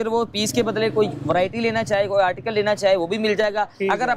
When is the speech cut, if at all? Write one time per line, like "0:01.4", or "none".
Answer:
none